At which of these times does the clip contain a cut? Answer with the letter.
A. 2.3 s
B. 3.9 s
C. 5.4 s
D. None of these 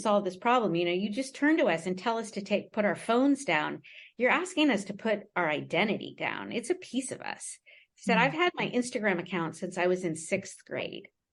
D